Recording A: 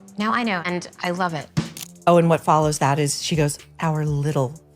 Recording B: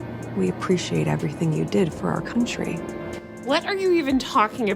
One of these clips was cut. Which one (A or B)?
A